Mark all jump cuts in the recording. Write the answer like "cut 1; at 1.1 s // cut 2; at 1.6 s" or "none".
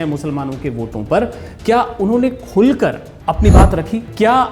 cut 1; at 3.6 s